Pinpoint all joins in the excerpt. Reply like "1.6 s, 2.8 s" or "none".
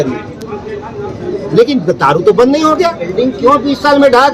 3.0 s